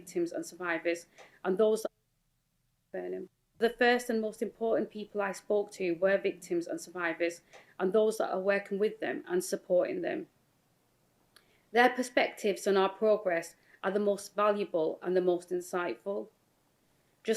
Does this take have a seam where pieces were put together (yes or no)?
no